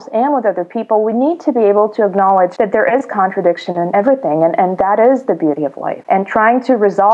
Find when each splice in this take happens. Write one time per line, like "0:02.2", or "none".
0:02.5
0:03.9
0:05.9

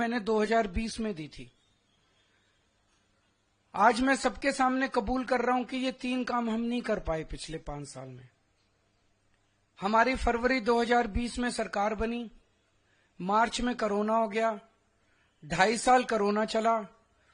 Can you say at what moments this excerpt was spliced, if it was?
none

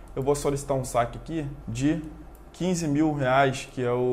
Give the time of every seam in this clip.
0:01.6

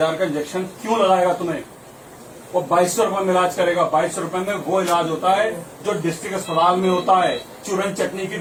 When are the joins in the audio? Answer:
none

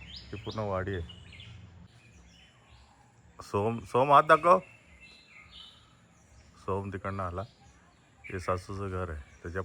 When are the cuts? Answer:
0:01.9

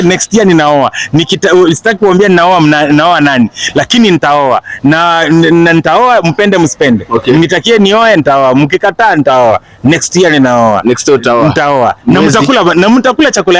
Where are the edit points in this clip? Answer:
none

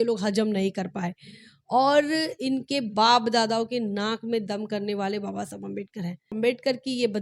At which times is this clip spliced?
0:06.3

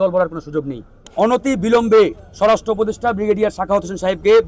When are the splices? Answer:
0:01.0

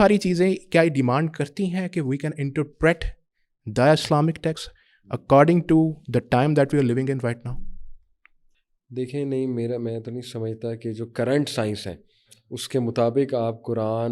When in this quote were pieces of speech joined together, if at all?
none

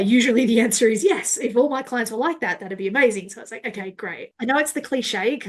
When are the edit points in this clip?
0:04.2

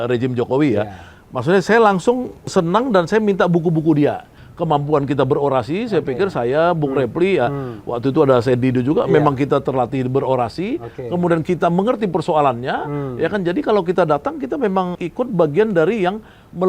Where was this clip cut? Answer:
0:02.5
0:04.4

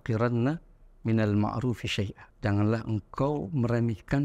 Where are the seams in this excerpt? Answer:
0:02.2

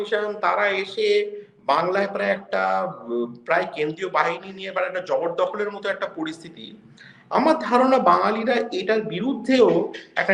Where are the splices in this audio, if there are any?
none

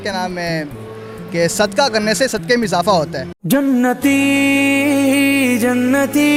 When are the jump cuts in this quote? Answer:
none

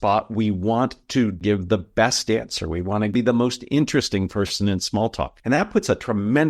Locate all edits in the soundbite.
0:01.4
0:03.1
0:05.3

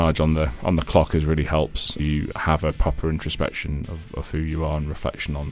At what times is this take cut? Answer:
0:02.0

